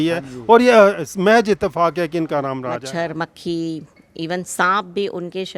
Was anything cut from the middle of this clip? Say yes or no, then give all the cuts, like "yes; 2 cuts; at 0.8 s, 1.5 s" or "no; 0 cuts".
yes; 1 cut; at 2.7 s